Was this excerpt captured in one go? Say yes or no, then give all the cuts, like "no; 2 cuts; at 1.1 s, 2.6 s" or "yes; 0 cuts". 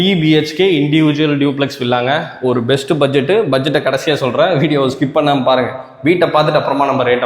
yes; 0 cuts